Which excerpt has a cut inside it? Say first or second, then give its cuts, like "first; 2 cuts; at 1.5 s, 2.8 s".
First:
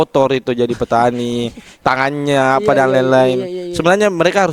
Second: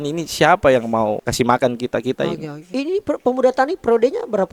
second; 2 cuts; at 1.2 s, 2.7 s